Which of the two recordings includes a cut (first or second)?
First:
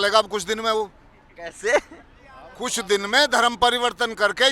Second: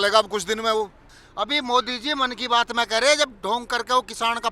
second